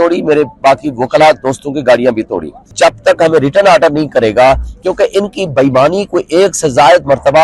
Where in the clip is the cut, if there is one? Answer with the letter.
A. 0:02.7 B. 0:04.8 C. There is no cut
A